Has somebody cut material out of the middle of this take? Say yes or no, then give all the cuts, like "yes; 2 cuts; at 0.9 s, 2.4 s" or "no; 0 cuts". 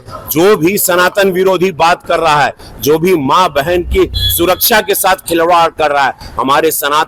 no; 0 cuts